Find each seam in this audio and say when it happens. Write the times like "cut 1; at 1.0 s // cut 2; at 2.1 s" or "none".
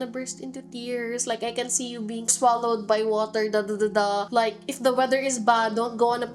cut 1; at 4.3 s